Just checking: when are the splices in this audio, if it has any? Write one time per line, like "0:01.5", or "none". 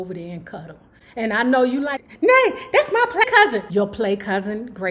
0:03.2